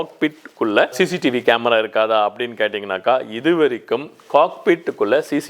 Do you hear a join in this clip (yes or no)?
no